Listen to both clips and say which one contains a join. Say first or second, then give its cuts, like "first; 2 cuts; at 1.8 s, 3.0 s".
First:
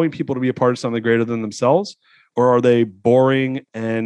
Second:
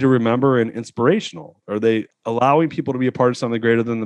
second; 1 cut; at 1.7 s